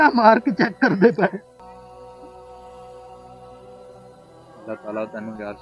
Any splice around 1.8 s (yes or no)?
no